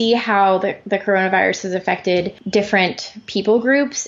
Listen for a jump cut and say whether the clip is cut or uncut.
cut